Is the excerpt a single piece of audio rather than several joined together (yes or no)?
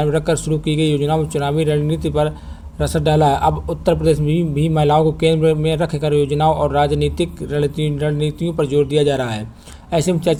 yes